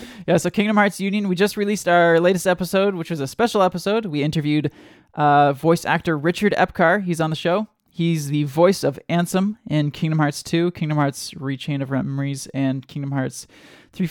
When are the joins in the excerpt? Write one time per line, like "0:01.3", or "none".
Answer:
none